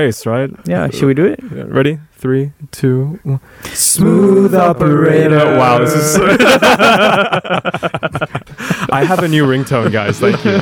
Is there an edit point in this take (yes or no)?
yes